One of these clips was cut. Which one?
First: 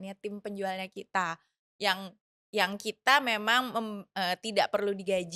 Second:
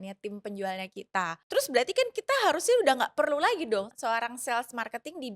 second; 2 cuts; at 1.4 s, 3.9 s

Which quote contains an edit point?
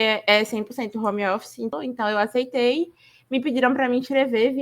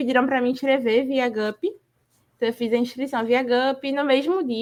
first; 1 cut; at 1.7 s

